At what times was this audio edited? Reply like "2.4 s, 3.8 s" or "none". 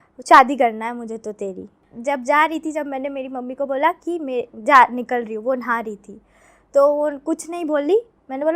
1.8 s